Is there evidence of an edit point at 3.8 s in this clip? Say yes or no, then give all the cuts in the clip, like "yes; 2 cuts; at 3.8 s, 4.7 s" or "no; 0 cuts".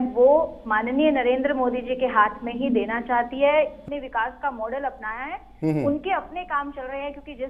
yes; 1 cut; at 3.8 s